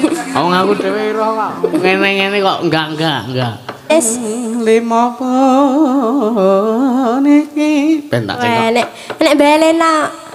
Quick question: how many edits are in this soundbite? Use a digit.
1